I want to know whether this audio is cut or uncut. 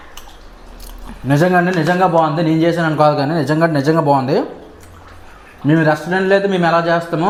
uncut